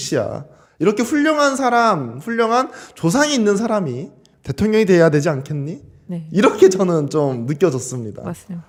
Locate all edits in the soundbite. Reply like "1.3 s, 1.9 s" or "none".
none